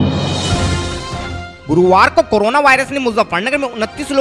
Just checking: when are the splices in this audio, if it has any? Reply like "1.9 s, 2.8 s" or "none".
1.5 s